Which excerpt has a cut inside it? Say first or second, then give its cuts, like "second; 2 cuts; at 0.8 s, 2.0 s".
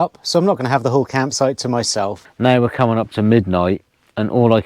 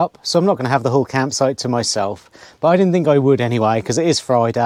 first; 1 cut; at 2.2 s